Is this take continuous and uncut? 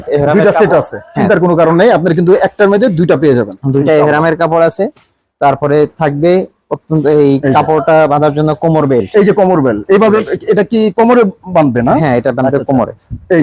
yes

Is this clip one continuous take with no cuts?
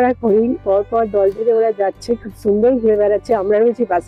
yes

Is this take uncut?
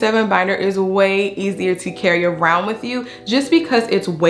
yes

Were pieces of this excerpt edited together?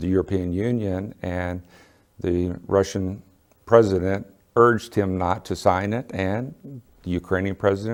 no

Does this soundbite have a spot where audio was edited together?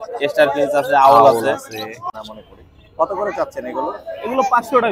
yes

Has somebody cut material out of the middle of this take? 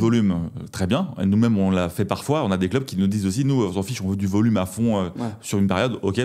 no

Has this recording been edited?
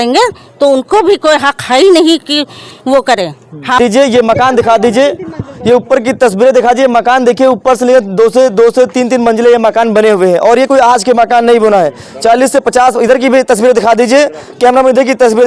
yes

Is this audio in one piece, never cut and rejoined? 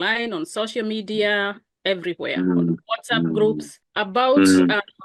yes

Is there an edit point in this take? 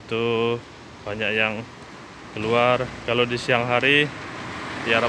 no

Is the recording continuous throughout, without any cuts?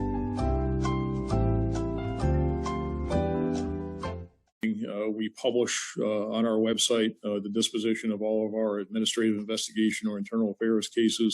no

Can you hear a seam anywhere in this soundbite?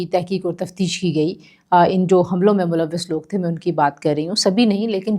no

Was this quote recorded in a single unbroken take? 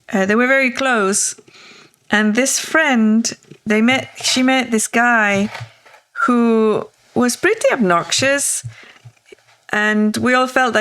no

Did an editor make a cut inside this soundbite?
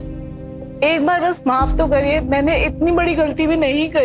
no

